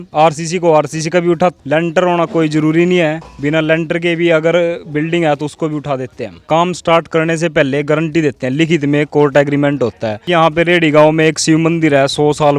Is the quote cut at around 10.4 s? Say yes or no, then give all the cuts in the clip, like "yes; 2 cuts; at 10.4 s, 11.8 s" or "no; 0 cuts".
yes; 3 cuts; at 1.6 s, 6.4 s, 10.4 s